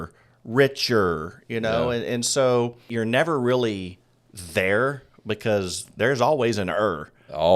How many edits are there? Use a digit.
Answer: 1